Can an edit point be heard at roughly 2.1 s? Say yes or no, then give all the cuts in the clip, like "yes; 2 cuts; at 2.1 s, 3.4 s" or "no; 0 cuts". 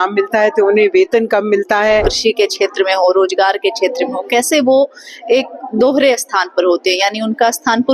yes; 1 cut; at 2.1 s